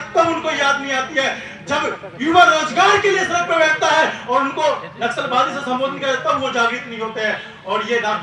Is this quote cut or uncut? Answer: uncut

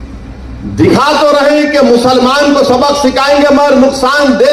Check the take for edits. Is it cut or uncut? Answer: uncut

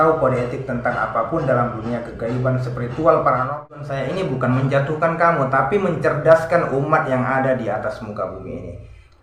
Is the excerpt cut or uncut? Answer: cut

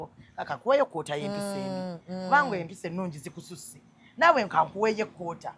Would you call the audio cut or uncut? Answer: uncut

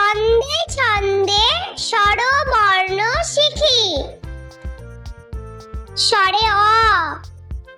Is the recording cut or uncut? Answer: uncut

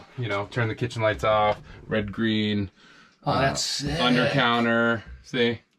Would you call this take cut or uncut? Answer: uncut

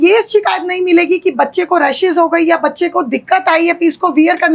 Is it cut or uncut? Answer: uncut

